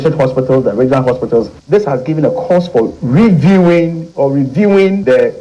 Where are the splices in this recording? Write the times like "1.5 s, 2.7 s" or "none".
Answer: none